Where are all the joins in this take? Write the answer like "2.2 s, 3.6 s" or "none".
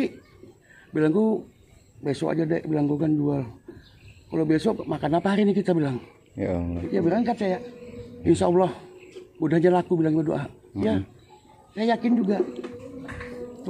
6.7 s, 8.1 s, 12.6 s